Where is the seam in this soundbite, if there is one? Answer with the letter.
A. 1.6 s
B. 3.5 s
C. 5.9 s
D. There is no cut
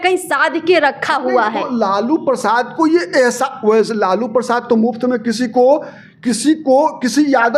D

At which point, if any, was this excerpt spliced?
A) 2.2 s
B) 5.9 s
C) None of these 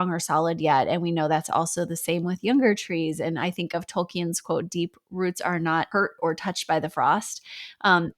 B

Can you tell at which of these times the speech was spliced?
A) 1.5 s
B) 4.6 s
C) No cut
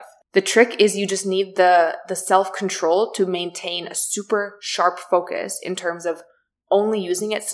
C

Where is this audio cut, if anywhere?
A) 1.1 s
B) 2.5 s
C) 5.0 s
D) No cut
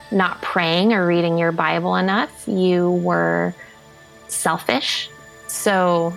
C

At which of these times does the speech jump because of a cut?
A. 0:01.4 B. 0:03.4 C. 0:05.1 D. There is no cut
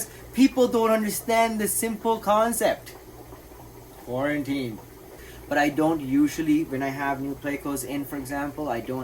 C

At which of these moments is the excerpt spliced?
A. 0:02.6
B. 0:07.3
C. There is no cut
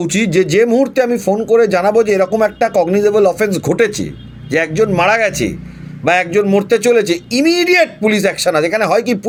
C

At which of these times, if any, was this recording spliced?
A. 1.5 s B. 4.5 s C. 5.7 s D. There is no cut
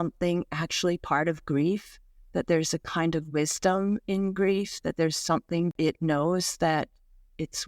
C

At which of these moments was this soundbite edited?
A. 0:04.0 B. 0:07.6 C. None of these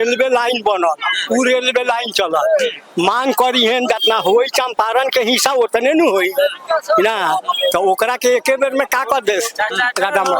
C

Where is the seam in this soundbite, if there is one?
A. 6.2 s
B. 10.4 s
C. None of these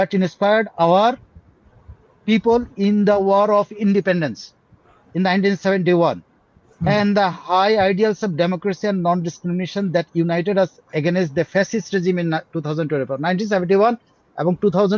C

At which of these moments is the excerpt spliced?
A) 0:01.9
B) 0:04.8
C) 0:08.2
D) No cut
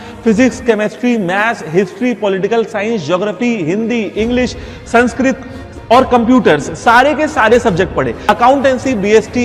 C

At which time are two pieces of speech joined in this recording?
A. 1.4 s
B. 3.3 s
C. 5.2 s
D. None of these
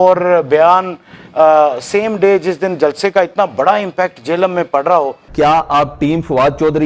C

